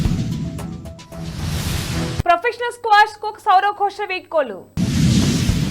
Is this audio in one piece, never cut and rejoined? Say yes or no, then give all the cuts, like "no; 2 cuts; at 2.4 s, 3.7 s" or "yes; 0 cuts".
no; 2 cuts; at 2.0 s, 4.7 s